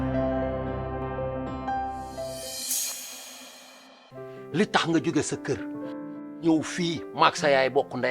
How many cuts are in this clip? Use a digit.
1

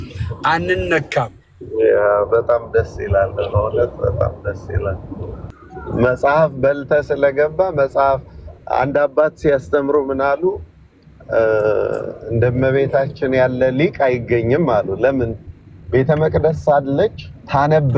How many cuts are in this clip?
1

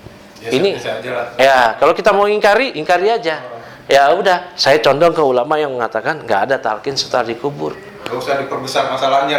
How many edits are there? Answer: 0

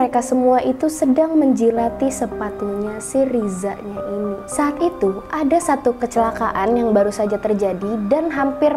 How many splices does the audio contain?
1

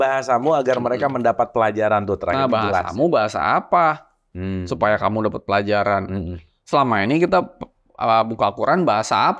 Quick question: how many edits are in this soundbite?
0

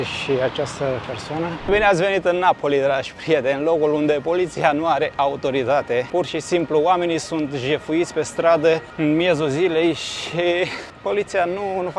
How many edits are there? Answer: 4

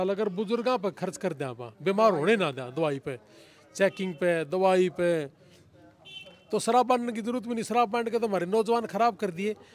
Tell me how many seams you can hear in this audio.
0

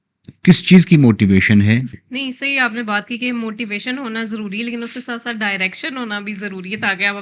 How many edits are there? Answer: 1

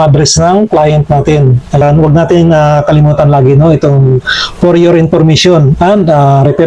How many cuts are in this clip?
1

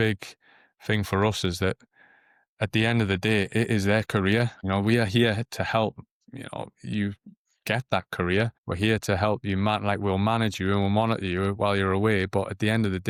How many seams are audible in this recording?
0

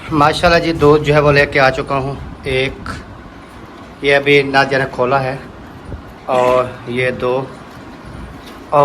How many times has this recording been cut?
0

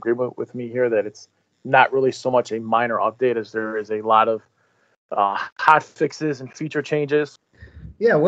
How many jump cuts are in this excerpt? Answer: 1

